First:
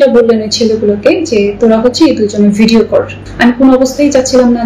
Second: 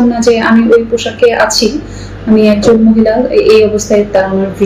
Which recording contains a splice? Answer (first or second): first